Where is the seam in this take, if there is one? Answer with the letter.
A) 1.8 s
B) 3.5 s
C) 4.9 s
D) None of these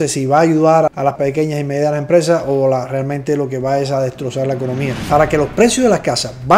C